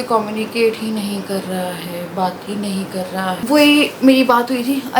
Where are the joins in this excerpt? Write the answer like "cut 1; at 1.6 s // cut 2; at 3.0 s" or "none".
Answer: cut 1; at 3.4 s

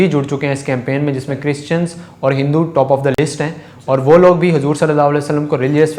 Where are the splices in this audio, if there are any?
none

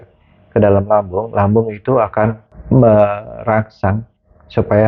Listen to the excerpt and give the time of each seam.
none

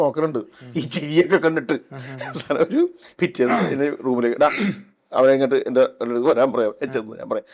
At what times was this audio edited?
none

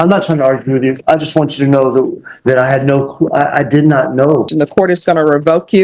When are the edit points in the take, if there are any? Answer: cut 1; at 4.5 s

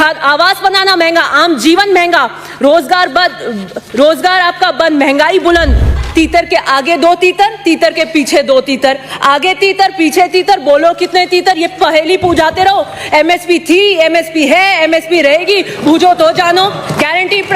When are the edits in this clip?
cut 1; at 6.0 s

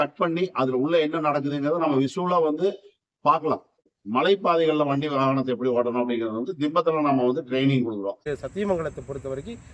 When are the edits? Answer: cut 1; at 3.8 s // cut 2; at 8.2 s

